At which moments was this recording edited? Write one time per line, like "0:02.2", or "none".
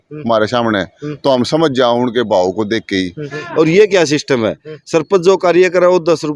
0:03.3